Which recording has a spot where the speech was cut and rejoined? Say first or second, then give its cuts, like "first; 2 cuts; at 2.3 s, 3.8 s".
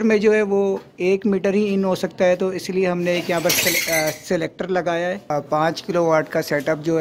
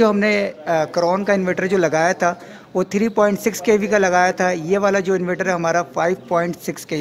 first; 1 cut; at 5.2 s